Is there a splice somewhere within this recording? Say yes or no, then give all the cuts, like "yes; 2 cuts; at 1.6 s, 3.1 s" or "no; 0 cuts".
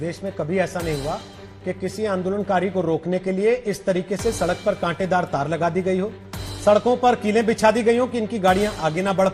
no; 0 cuts